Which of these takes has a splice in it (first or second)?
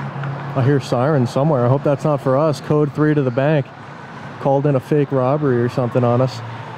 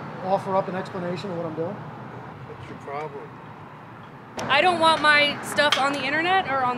second